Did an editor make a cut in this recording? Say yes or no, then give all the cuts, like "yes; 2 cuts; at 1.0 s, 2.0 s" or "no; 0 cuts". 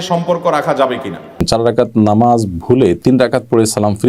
yes; 1 cut; at 1.4 s